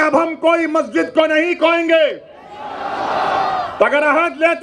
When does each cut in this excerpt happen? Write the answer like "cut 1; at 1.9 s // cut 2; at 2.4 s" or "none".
none